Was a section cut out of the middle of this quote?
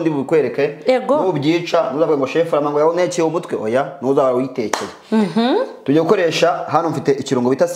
no; 0 cuts

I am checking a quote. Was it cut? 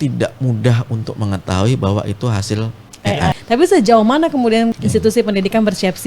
yes; 2 cuts; at 3.4 s, 4.8 s

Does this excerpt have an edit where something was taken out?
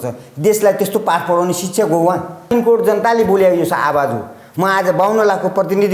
yes; 1 cut; at 2.4 s

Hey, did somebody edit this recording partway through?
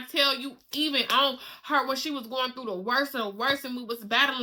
no; 0 cuts

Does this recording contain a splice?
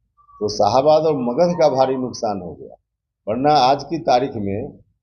no; 0 cuts

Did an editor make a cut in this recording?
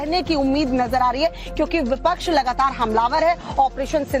yes; 1 cut; at 1.7 s

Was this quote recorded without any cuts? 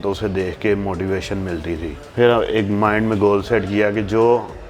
no; 1 cut; at 2.0 s

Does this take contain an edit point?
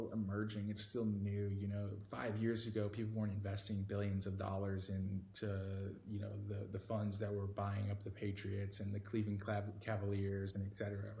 no; 0 cuts

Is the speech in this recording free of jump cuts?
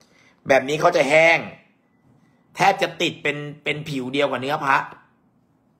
yes; 0 cuts

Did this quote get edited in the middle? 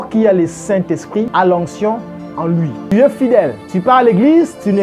yes; 3 cuts; at 1.3 s, 2.8 s, 3.6 s

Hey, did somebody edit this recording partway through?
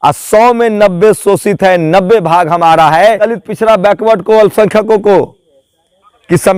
yes; 1 cut; at 3.2 s

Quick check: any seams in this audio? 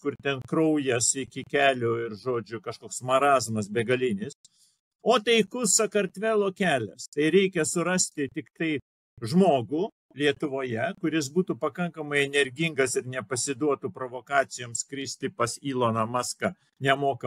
no; 0 cuts

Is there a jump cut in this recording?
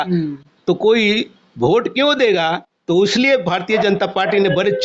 no; 0 cuts

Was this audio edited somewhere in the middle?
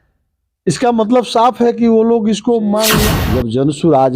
yes; 1 cut; at 3.2 s

